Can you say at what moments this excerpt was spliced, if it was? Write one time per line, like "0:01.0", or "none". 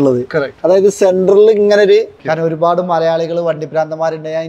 0:02.2

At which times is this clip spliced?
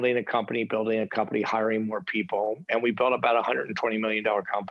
none

